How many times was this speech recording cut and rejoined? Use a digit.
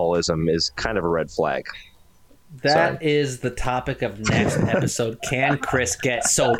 0